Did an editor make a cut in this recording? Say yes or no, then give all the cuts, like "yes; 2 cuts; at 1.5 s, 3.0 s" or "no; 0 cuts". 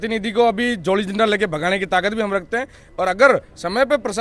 no; 0 cuts